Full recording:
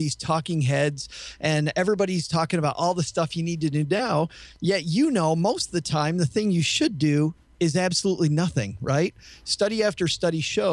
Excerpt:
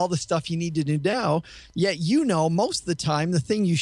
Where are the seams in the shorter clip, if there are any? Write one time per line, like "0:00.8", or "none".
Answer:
none